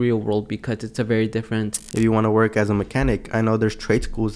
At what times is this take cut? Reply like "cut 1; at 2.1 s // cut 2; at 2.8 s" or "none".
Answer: cut 1; at 1.8 s